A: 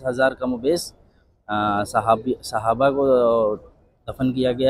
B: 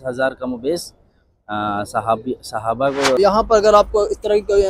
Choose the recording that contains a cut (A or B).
B